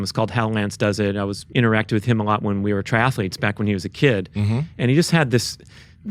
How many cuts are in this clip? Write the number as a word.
one